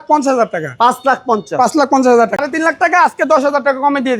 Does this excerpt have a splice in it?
yes; 1 cut; at 2.3 s

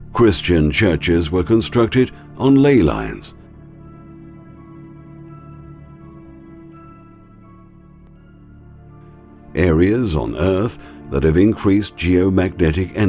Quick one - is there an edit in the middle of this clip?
yes; 1 cut; at 6.5 s

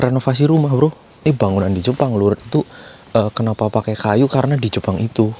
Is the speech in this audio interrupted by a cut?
yes; 1 cut; at 1.1 s

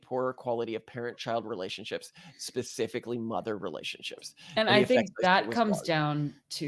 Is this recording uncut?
yes; 0 cuts

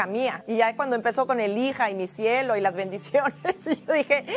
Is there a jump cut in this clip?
no; 0 cuts

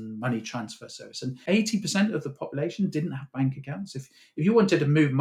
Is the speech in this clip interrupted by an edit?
yes; 1 cut; at 1.4 s

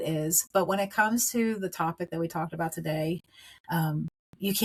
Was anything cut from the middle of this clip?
no; 0 cuts

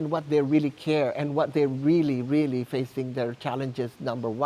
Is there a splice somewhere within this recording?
no; 0 cuts

